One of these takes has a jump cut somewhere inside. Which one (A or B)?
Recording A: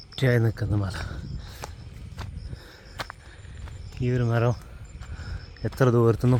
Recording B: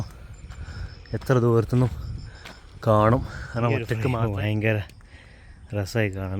B